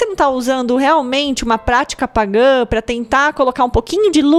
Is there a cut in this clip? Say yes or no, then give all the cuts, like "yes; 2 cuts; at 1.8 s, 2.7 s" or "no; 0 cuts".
no; 0 cuts